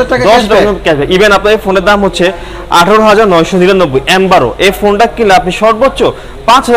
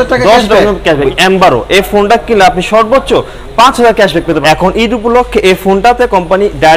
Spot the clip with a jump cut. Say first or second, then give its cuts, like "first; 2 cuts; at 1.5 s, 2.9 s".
second; 2 cuts; at 1.0 s, 4.4 s